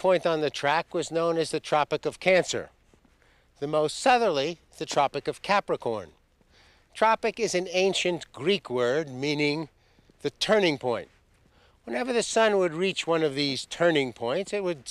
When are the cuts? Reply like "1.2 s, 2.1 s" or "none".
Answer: 2.2 s